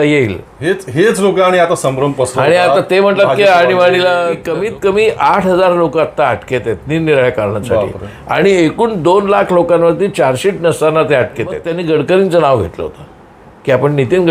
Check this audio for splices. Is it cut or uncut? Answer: cut